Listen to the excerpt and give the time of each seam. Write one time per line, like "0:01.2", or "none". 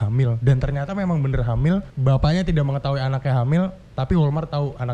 0:01.9